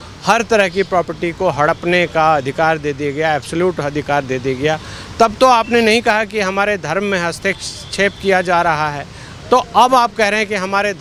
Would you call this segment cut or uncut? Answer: uncut